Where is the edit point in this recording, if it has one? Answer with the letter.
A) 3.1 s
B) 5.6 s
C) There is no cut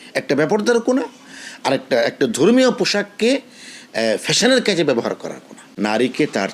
B